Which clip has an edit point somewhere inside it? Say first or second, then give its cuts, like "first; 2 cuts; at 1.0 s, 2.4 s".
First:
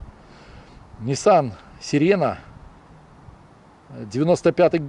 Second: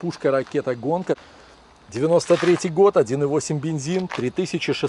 second; 1 cut; at 1.3 s